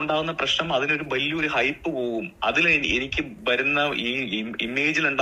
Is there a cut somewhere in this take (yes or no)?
no